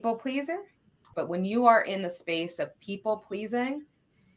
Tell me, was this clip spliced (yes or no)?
yes